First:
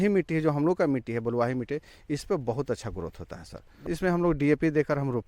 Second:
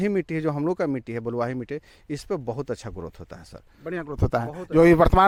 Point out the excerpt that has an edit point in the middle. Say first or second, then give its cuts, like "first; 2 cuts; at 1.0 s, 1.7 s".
first; 1 cut; at 3.8 s